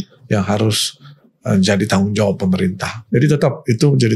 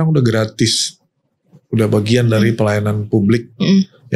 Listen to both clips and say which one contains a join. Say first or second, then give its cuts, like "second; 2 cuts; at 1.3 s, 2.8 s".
first; 1 cut; at 2.9 s